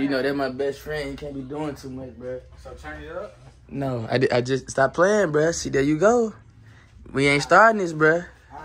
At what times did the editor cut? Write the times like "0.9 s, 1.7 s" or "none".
none